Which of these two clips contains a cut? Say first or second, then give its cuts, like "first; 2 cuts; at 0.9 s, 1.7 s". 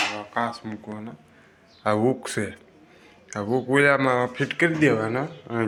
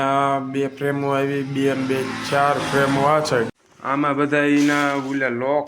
second; 1 cut; at 3.5 s